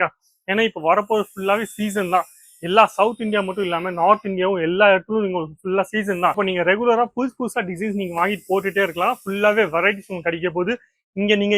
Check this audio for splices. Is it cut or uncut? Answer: uncut